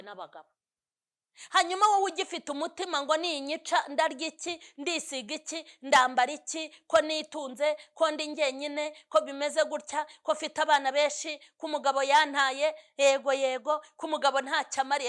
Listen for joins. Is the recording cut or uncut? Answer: uncut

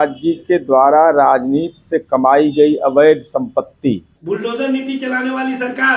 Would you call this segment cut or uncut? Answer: cut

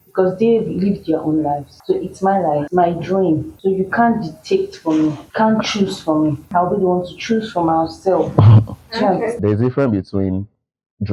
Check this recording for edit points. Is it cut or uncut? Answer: cut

